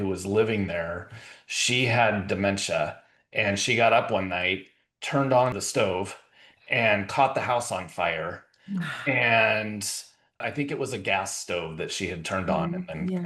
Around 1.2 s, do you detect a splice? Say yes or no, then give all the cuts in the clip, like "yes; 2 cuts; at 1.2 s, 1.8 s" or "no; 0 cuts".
no; 2 cuts; at 5.6 s, 10.5 s